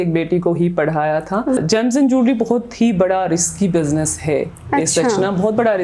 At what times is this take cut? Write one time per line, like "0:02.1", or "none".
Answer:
0:01.6